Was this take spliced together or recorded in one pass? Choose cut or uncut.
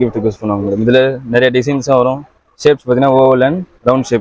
uncut